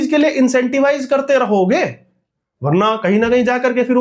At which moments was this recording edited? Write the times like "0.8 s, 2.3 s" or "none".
none